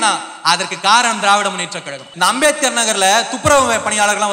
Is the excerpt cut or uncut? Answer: cut